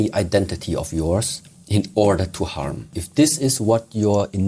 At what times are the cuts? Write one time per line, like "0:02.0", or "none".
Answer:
0:03.0